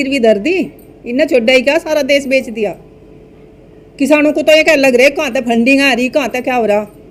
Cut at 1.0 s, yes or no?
no